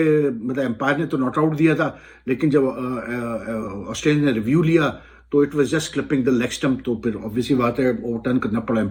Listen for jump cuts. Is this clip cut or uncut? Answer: uncut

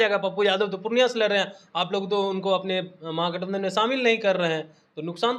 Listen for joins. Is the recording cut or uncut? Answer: uncut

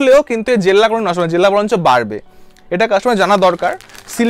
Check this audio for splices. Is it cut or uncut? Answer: uncut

